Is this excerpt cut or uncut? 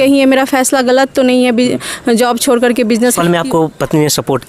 cut